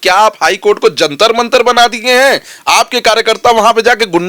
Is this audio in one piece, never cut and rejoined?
yes; 0 cuts

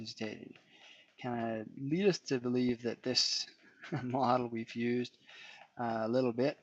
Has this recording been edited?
yes; 1 cut; at 1.9 s

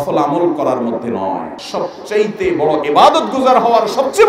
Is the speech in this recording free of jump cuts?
no; 1 cut; at 1.6 s

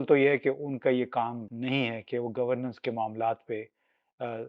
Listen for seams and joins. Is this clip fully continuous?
no; 1 cut; at 1.5 s

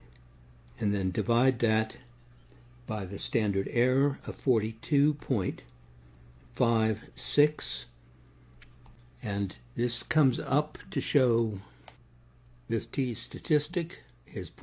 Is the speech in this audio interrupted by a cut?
yes; 1 cut; at 9.0 s

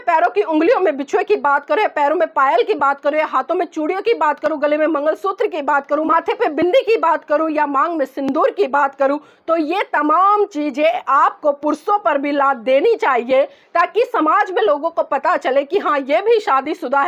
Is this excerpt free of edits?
no; 1 cut; at 6.1 s

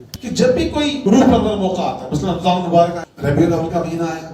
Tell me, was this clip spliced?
yes; 2 cuts; at 1.0 s, 3.1 s

